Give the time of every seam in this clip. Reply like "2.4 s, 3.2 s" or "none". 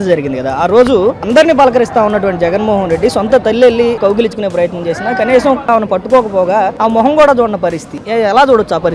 4.0 s, 5.6 s, 6.7 s, 8.0 s